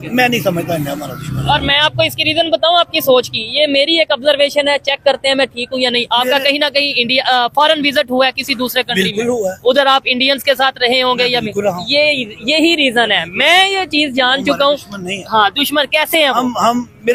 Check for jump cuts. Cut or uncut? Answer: uncut